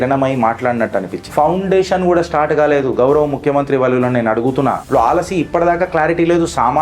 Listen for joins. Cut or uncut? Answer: cut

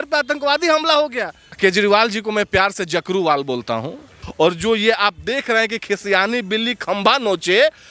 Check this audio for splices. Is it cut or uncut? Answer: cut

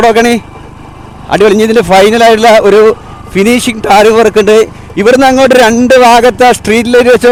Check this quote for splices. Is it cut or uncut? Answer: uncut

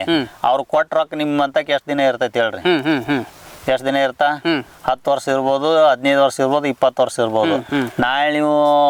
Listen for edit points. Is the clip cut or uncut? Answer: uncut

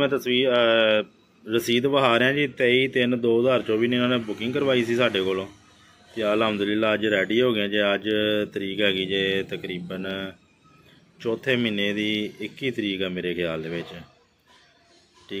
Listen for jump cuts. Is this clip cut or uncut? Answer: uncut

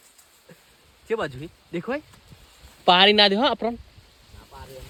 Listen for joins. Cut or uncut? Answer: uncut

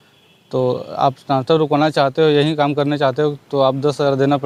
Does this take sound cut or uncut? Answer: uncut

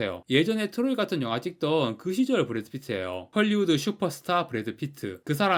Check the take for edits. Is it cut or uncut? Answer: uncut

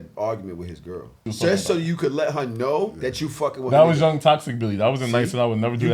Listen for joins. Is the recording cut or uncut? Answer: cut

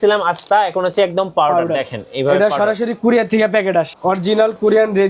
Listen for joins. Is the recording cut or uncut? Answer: cut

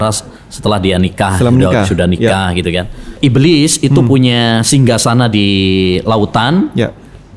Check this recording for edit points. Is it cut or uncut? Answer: cut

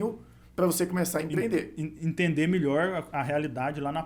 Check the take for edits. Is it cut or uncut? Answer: uncut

